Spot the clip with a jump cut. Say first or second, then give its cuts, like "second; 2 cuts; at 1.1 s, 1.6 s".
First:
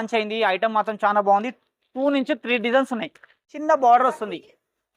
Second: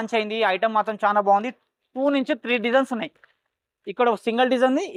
first; 1 cut; at 3.5 s